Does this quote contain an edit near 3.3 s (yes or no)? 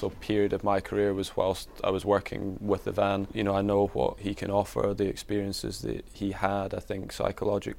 yes